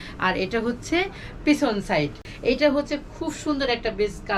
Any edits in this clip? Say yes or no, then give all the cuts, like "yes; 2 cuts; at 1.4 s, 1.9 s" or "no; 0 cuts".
yes; 1 cut; at 2.3 s